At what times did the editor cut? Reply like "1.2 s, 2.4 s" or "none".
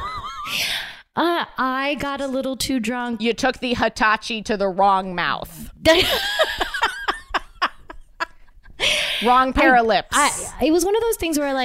none